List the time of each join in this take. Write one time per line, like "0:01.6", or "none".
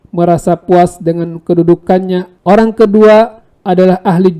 0:02.3